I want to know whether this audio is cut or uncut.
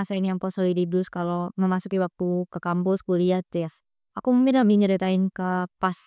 uncut